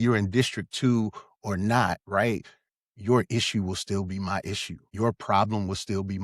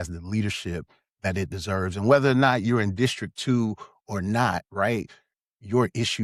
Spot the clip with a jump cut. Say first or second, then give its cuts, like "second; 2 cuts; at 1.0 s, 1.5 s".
first; 1 cut; at 4.9 s